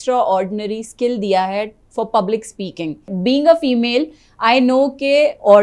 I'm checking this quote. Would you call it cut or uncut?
cut